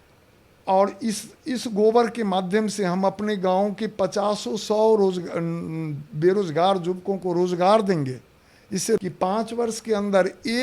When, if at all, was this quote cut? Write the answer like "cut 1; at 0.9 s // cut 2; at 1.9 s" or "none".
cut 1; at 9.0 s